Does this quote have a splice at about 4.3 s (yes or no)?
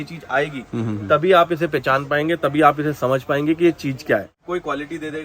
yes